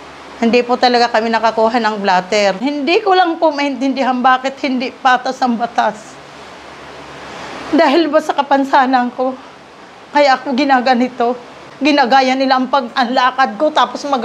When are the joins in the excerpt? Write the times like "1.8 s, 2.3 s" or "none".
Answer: 2.6 s, 11.7 s